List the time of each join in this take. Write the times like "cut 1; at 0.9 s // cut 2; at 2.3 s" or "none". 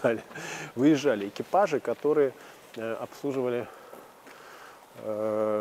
none